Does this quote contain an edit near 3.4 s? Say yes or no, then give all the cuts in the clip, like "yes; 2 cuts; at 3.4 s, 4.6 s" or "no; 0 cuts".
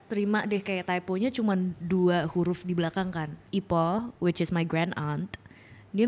yes; 1 cut; at 3.4 s